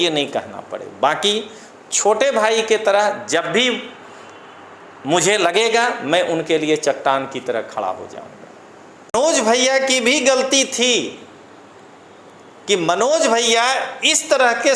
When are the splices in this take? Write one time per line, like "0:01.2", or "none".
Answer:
0:09.1